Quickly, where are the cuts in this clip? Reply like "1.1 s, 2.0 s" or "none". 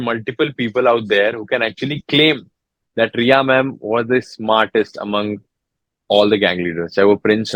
none